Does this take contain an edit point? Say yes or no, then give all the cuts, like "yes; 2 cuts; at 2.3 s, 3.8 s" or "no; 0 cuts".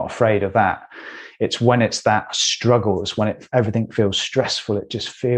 no; 0 cuts